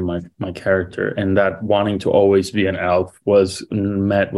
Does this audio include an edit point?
no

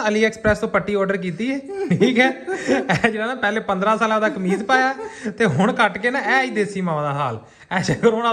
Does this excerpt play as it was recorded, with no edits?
yes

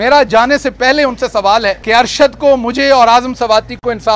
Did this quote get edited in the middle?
yes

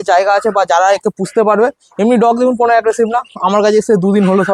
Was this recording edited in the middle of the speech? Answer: no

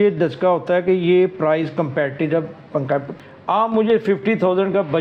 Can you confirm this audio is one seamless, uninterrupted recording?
no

